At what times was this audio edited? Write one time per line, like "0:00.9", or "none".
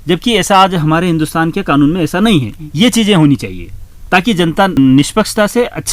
0:04.8